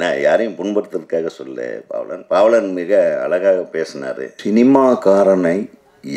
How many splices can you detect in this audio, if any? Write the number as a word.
one